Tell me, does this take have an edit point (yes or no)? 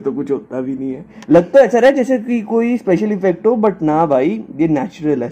yes